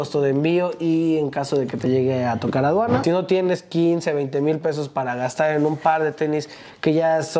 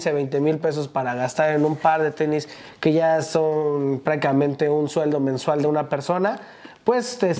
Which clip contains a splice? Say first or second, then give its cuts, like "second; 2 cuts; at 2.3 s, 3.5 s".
first; 1 cut; at 3.0 s